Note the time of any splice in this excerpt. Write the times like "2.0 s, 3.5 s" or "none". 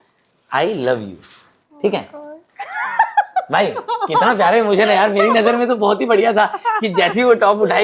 none